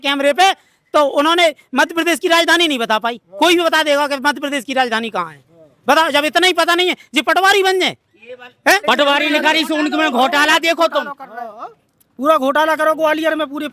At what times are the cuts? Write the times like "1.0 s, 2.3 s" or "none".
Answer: 8.8 s